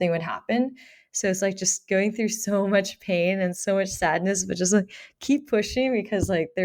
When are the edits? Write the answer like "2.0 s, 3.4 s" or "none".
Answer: none